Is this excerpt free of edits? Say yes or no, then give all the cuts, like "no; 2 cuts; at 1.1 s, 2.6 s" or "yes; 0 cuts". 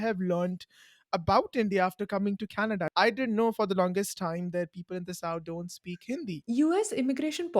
no; 2 cuts; at 2.9 s, 6.4 s